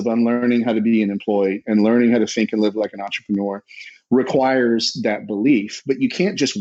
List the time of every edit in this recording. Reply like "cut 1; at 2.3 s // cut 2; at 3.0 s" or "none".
none